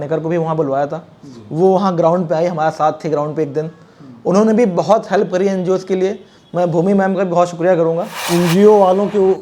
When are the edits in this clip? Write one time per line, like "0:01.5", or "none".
0:08.1